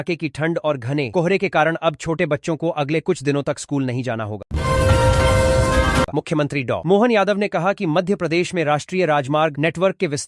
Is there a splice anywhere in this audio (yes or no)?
yes